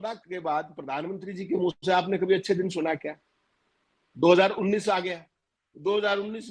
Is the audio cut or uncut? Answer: uncut